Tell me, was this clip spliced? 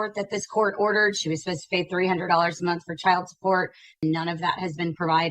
yes; 1 cut; at 3.9 s

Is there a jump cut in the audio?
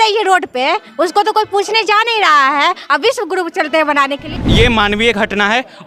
yes; 1 cut; at 4.3 s

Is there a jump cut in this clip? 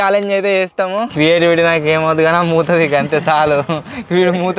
yes; 1 cut; at 1.1 s

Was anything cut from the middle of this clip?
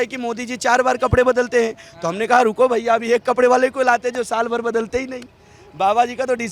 no; 0 cuts

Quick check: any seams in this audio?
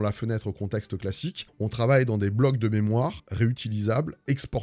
no; 0 cuts

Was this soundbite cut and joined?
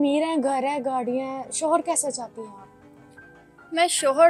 no; 0 cuts

